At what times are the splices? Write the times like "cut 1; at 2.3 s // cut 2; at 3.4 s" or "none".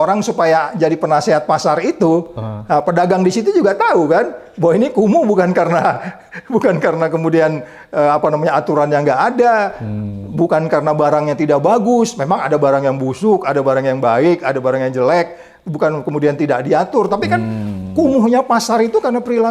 none

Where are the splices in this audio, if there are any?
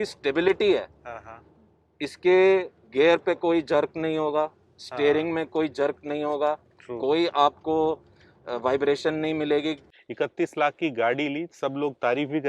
cut 1; at 9.9 s

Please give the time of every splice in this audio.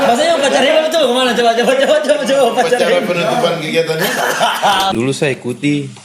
cut 1; at 4.9 s

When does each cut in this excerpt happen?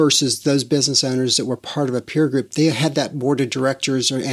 none

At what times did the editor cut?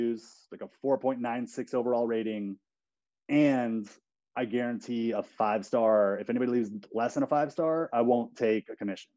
none

